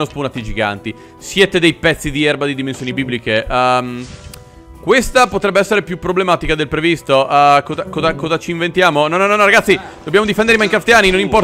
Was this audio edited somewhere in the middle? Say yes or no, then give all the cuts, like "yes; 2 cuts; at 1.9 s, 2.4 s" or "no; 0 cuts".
no; 0 cuts